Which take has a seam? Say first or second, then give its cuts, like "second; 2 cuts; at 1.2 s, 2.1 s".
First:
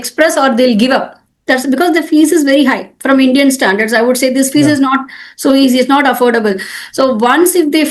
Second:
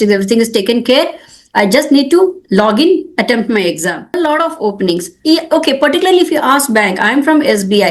second; 1 cut; at 4.2 s